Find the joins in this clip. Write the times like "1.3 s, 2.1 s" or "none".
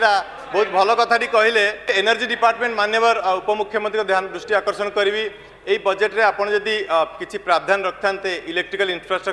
1.8 s